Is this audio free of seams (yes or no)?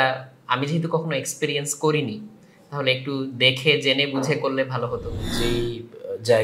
no